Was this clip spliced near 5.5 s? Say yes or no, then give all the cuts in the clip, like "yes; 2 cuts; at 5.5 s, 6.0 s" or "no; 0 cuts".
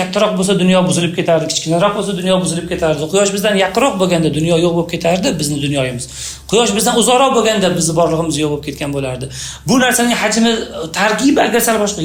no; 0 cuts